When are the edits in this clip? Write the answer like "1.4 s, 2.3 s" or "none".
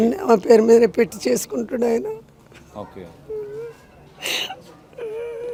none